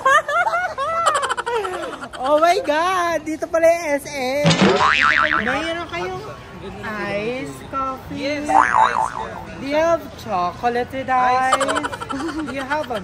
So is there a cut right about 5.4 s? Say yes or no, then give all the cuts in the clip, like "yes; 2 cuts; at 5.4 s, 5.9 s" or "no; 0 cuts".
yes; 1 cut; at 5.4 s